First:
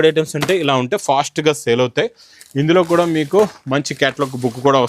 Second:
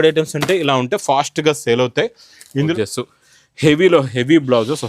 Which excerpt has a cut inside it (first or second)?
second